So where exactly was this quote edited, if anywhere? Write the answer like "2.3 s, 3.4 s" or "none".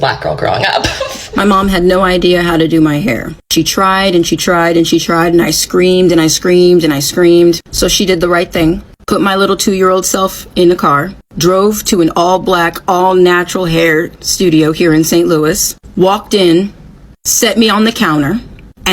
1.2 s